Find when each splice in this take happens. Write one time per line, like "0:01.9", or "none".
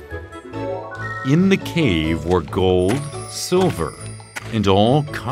0:01.1